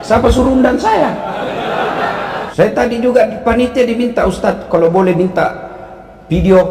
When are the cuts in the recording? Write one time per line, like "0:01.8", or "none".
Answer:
0:02.5